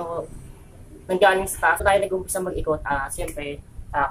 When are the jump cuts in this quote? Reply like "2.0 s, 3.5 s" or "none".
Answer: 1.8 s